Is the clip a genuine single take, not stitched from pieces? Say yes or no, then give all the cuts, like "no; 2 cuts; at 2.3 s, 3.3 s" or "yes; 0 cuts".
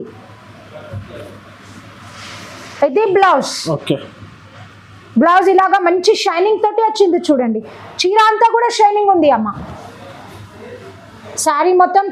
yes; 0 cuts